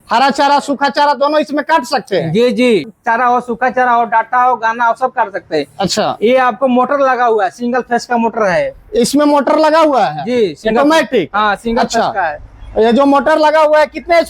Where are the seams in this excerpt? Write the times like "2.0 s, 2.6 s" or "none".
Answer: 2.8 s